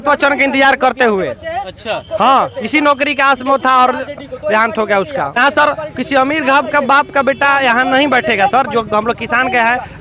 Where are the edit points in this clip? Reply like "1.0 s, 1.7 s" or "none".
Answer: 5.4 s